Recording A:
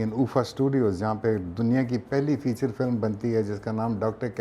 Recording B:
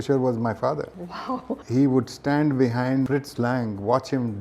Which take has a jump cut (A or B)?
B